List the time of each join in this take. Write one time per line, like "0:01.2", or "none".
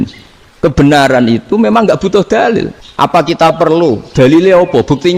0:02.8